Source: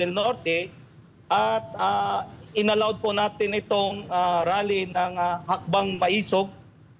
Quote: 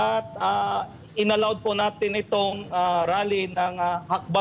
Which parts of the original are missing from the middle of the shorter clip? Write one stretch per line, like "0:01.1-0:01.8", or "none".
none